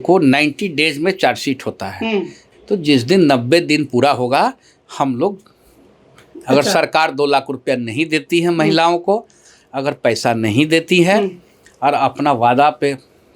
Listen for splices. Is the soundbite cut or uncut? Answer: cut